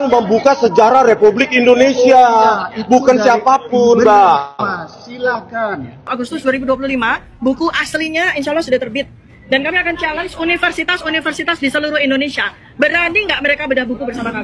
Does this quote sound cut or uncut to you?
cut